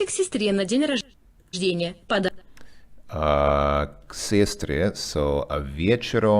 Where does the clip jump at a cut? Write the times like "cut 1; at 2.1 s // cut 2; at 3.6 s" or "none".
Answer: none